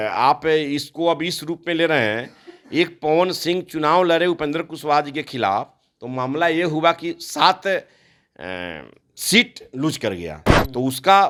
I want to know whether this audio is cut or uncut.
uncut